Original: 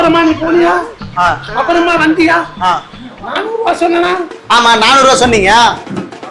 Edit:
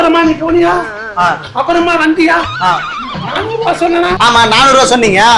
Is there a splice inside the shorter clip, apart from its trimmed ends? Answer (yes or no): yes